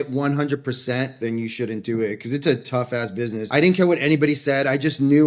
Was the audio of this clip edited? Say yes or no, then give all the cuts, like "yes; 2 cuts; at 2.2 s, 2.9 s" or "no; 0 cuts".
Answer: yes; 2 cuts; at 1.2 s, 3.5 s